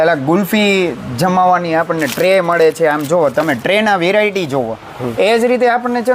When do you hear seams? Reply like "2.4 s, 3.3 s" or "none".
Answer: none